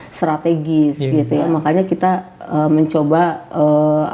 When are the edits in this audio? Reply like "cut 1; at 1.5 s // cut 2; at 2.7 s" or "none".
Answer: cut 1; at 1.5 s